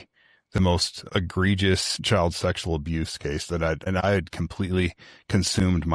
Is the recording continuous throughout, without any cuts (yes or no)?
no